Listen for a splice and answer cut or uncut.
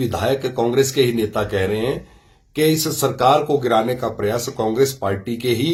uncut